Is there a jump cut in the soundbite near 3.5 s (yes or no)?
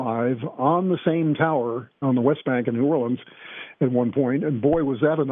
no